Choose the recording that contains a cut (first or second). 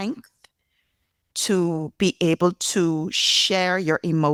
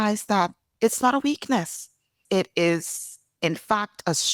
second